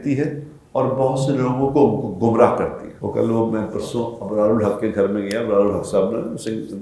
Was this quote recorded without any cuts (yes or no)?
no